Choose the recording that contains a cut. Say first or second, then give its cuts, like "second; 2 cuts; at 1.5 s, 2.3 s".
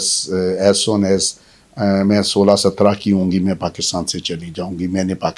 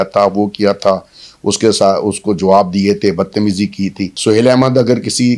second; 1 cut; at 4.1 s